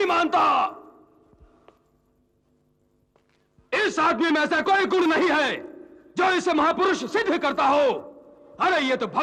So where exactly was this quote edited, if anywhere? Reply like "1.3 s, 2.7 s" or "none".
none